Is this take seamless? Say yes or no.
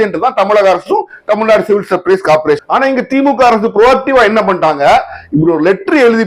no